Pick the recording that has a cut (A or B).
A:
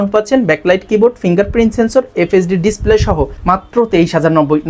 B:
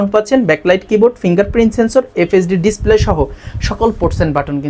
A